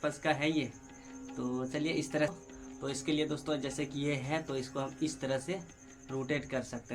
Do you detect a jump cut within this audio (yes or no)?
yes